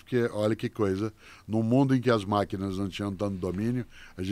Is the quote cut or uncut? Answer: uncut